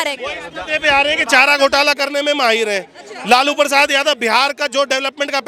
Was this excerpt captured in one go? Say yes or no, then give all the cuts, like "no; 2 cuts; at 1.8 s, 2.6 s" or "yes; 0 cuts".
yes; 0 cuts